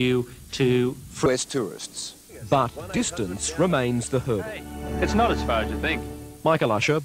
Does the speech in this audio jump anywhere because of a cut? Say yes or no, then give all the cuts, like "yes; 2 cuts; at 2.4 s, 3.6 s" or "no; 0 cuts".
no; 0 cuts